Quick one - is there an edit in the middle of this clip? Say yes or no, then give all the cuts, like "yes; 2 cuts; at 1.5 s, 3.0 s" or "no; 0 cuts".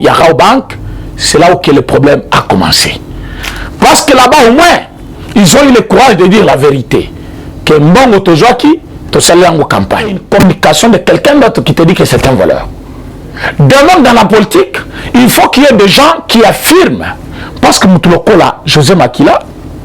yes; 1 cut; at 10.2 s